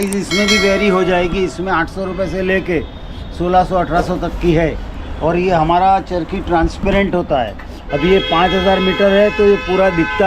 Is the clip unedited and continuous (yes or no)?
yes